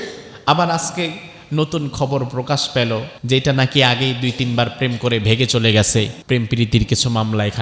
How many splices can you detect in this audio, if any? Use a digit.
2